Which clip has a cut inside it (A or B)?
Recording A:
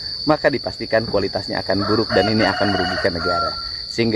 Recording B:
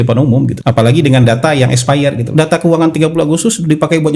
B